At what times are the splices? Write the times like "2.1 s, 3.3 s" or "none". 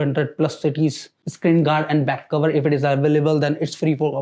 1.2 s

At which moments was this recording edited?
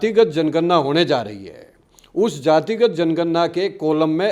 none

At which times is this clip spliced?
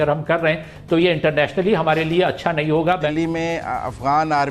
3.1 s

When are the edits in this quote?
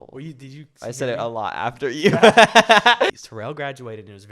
3.1 s

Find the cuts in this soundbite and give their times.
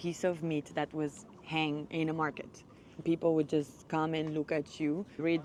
none

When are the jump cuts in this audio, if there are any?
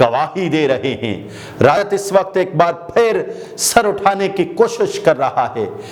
1.8 s

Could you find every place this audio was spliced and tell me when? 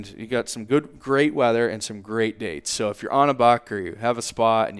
none

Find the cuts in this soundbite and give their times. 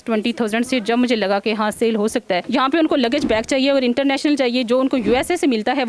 2.4 s

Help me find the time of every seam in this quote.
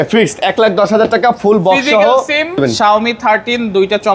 2.6 s

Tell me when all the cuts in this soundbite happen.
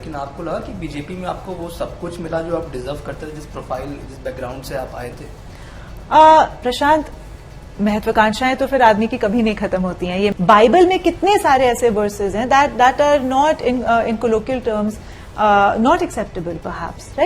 10.3 s

